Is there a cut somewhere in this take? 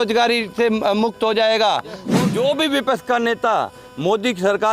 yes; 1 cut; at 2.1 s

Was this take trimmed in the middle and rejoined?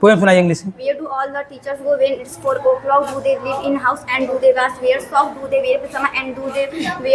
no; 0 cuts

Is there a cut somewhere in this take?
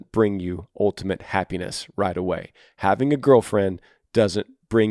no; 0 cuts

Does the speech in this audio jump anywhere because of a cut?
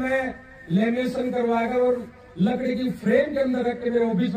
no; 0 cuts

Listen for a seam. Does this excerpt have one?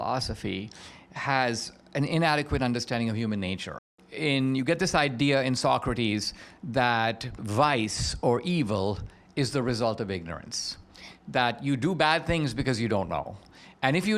yes; 2 cuts; at 3.9 s, 7.4 s

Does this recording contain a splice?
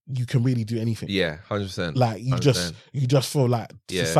no; 0 cuts

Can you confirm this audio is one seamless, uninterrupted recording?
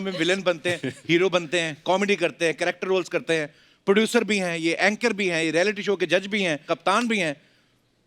yes; 0 cuts

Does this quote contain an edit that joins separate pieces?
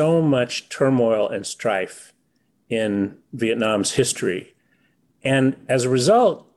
no; 0 cuts

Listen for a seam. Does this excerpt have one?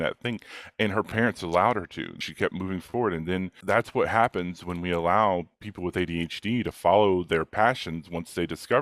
yes; 2 cuts; at 2.3 s, 3.6 s

